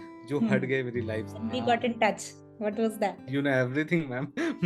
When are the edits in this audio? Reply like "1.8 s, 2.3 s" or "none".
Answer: 1.4 s